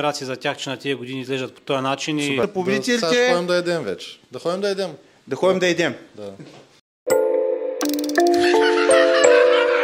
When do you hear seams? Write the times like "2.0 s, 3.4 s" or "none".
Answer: 2.4 s, 6.8 s

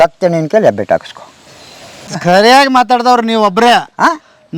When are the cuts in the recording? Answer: 2.1 s

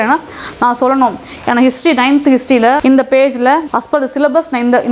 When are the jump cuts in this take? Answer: 2.8 s, 3.7 s

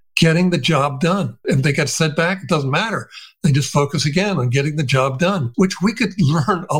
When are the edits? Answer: 1.4 s, 5.5 s

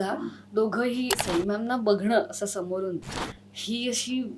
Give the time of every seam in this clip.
1.1 s

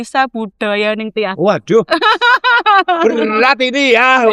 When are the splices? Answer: none

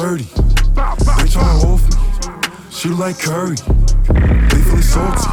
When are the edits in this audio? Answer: none

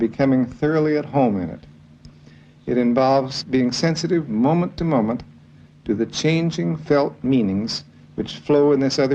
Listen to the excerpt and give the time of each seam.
3.4 s

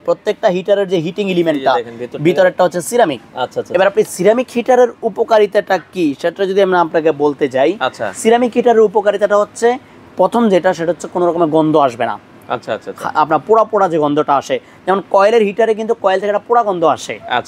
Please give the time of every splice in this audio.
none

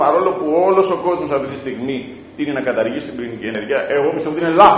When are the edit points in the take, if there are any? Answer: 3.6 s

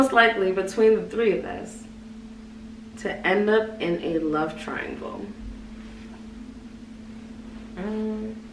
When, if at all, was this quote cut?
none

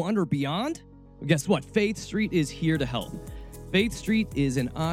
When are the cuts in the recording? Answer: none

